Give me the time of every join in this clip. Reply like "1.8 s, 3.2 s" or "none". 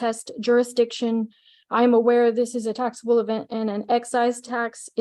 none